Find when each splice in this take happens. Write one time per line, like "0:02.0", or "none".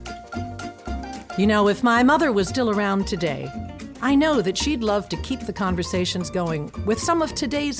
0:01.3